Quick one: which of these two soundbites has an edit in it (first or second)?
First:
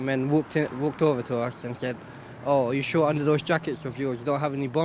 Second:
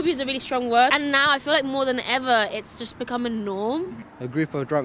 second